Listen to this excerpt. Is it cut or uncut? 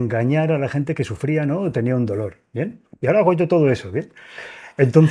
uncut